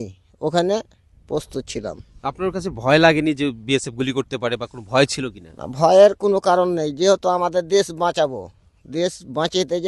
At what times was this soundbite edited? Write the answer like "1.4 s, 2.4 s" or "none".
none

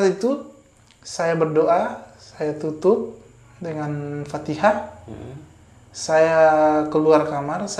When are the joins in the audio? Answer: none

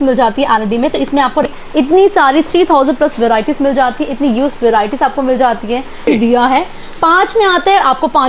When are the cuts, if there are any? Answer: 1.5 s, 6.1 s

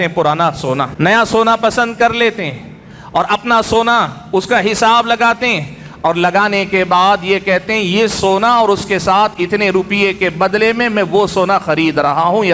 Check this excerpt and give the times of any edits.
0.9 s

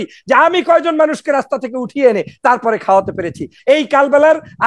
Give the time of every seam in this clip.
3.5 s

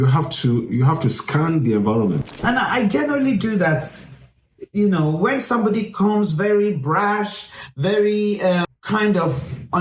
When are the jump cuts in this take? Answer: 2.3 s, 8.7 s

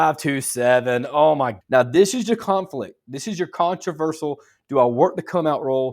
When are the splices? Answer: 1.6 s

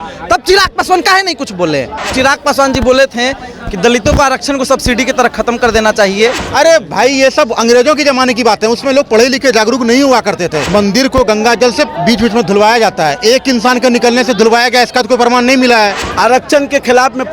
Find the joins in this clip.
2.1 s, 6.4 s, 10.6 s, 16.0 s

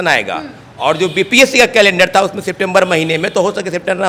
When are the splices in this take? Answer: none

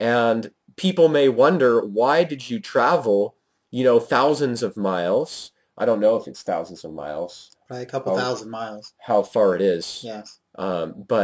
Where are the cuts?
4.5 s

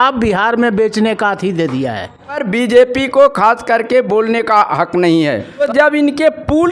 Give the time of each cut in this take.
2.4 s, 5.6 s

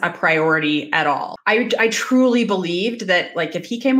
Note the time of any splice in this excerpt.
1.3 s

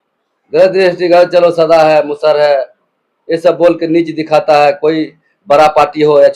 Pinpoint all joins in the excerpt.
none

